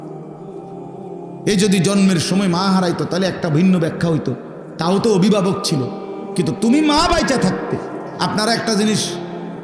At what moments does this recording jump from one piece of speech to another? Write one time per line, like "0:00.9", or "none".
0:01.5